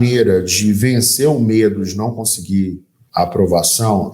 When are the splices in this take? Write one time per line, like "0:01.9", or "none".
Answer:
0:03.0